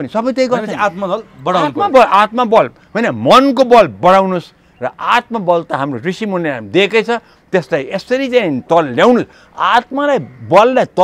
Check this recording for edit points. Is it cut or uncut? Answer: uncut